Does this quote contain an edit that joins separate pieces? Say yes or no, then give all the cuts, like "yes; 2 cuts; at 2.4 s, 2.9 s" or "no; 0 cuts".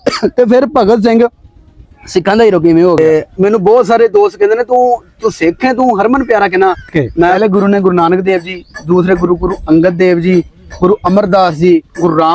yes; 2 cuts; at 3.0 s, 7.4 s